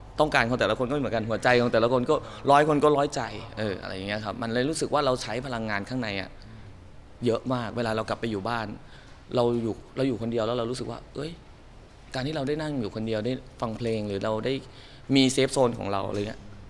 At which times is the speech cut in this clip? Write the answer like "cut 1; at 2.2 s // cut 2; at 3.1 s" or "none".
none